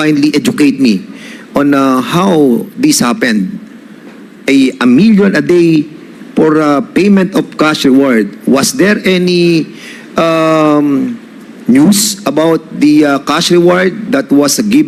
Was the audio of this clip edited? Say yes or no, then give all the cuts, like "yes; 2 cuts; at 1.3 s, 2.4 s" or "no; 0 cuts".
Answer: no; 0 cuts